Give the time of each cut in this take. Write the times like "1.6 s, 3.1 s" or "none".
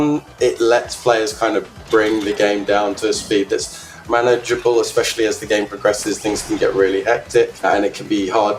7.6 s